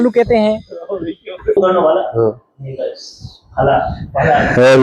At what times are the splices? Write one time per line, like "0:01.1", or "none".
0:01.6